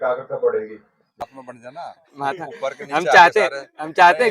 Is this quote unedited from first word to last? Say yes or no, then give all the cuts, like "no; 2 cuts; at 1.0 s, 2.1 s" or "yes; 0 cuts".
no; 1 cut; at 1.2 s